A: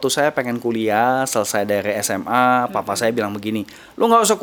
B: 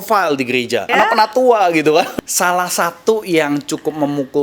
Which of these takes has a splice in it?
B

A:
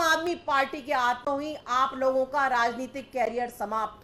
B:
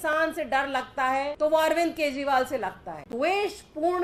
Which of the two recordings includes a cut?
B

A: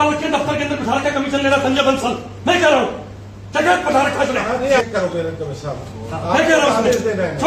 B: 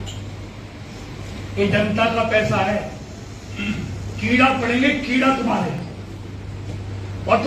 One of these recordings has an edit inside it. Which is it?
A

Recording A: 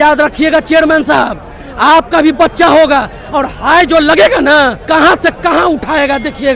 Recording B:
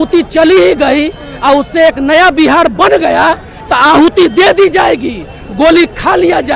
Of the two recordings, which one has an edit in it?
A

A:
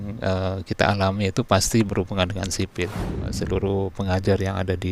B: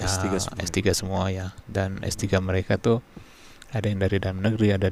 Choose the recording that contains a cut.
A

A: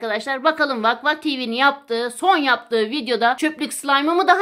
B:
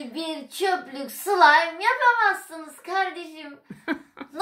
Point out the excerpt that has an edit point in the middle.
A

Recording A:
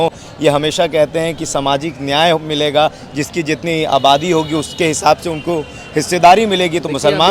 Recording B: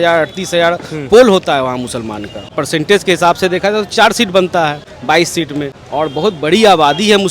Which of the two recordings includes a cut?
B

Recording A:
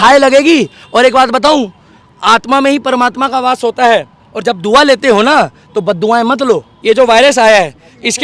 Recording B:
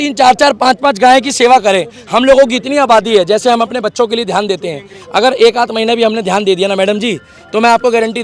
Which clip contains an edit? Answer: A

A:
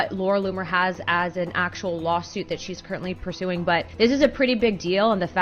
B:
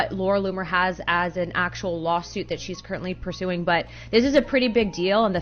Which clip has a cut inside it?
A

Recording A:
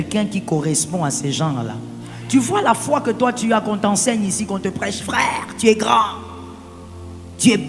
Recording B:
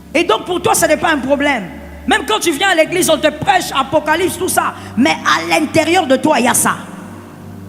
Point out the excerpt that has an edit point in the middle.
A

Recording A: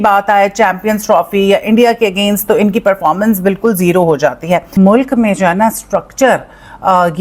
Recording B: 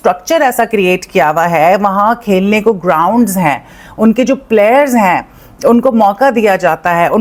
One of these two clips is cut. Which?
A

